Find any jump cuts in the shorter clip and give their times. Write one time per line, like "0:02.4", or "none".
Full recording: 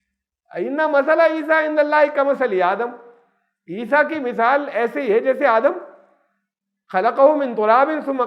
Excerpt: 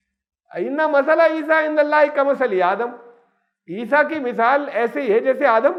none

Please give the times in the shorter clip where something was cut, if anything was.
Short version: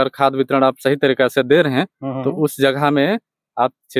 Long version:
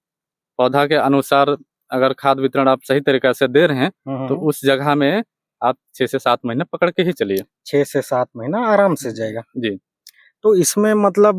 none

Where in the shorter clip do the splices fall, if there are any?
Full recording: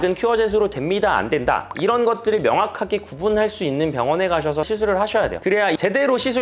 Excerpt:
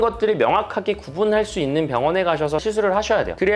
none

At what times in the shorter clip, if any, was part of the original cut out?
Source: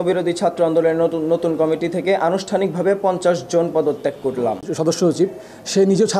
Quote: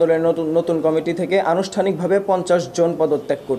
none

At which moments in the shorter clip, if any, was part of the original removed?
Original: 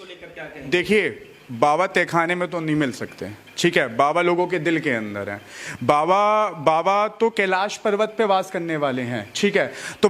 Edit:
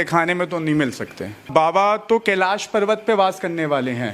0:01.4

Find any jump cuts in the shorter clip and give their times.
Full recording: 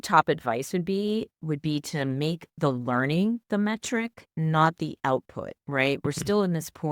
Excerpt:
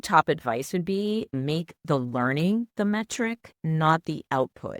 0:01.3

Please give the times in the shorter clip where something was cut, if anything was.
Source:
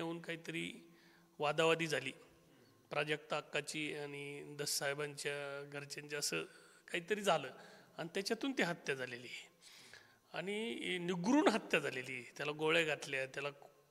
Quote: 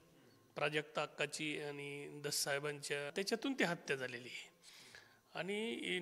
0:03.1

